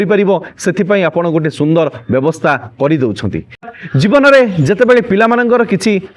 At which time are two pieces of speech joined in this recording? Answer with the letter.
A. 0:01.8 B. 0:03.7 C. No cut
B